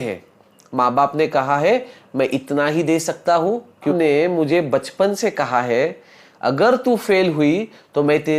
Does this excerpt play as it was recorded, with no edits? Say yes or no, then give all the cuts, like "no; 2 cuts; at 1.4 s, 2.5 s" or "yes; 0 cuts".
no; 1 cut; at 3.9 s